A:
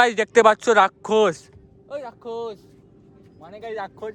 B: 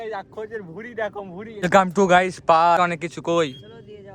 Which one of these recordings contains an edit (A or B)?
B